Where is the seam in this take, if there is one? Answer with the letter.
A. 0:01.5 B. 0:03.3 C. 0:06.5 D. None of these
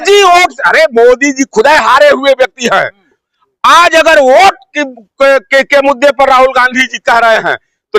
B